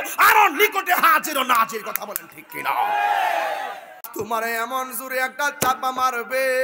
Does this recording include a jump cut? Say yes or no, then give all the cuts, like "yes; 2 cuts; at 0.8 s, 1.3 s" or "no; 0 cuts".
yes; 1 cut; at 4.0 s